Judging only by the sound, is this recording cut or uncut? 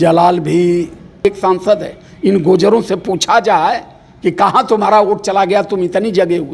cut